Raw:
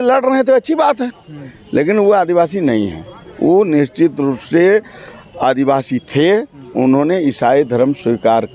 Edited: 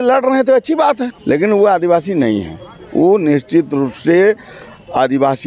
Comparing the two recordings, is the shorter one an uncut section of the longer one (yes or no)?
no